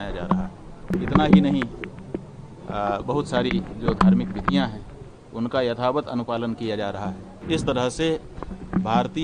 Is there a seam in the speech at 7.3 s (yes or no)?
yes